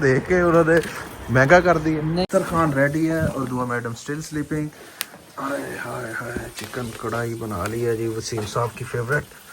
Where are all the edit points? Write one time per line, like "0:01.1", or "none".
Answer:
0:02.1